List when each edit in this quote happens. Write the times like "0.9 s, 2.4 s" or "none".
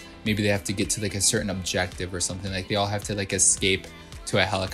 none